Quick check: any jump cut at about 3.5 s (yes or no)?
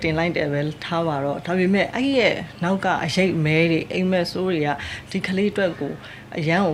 no